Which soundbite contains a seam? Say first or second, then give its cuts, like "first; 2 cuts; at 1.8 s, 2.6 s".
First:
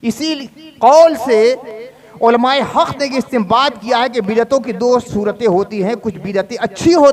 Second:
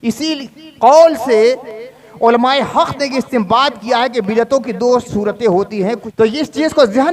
second; 1 cut; at 6.1 s